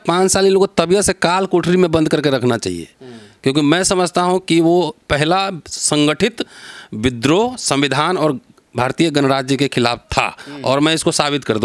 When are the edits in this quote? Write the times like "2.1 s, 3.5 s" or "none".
none